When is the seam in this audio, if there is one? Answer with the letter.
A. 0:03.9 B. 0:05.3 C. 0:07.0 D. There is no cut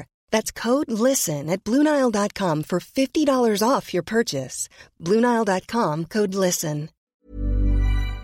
C